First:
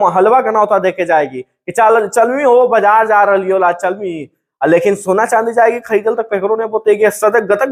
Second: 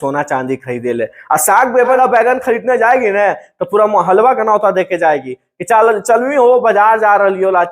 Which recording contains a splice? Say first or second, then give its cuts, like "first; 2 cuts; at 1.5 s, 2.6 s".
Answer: second; 1 cut; at 2.0 s